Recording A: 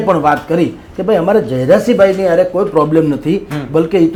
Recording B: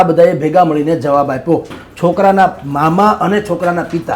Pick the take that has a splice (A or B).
B